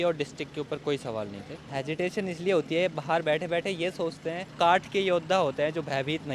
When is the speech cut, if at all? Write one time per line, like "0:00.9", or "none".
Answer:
0:01.7
0:04.5